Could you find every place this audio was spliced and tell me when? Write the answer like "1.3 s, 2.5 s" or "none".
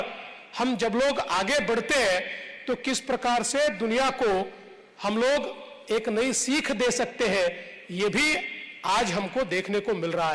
none